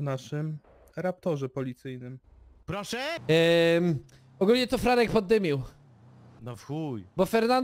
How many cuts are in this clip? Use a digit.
1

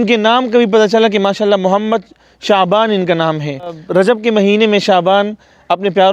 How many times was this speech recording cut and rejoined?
1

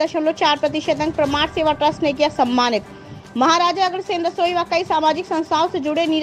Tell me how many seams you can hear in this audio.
0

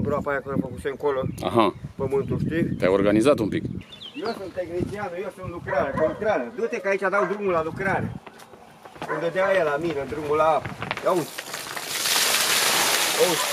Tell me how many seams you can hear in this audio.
1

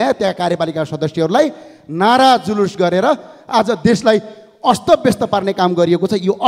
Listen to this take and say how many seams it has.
0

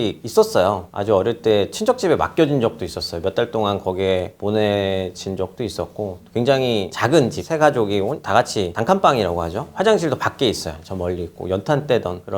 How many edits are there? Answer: 0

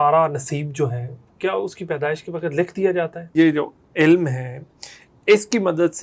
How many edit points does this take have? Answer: 1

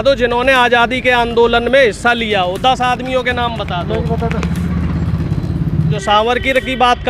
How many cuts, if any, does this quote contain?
1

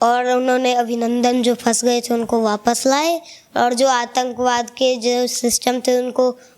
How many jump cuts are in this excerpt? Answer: 0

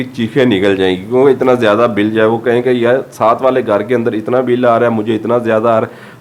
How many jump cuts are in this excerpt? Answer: 0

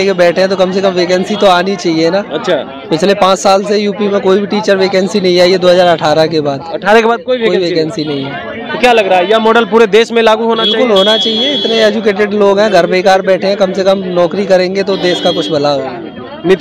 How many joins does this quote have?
0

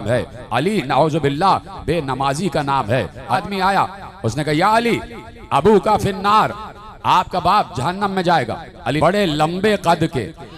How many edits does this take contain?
2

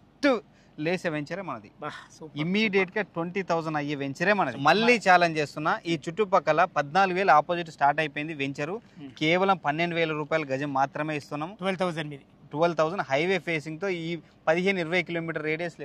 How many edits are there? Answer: 1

